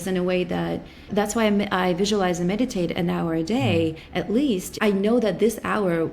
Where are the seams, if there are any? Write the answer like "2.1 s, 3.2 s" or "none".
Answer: 1.1 s